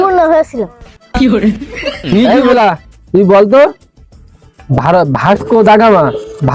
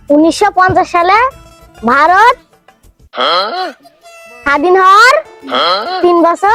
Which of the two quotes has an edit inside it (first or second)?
first